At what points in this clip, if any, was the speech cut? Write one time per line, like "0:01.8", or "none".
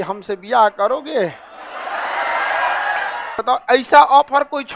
0:03.4